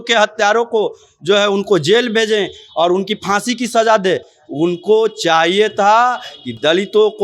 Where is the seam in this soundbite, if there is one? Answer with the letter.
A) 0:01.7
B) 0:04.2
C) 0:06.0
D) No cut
D